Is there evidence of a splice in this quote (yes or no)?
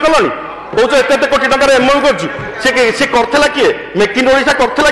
no